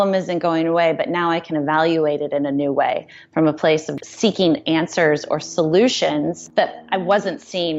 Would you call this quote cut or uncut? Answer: cut